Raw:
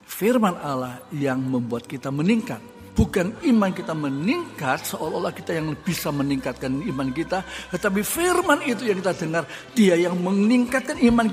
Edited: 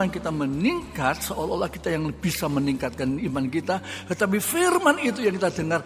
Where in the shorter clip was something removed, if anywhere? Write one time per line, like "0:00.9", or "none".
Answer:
none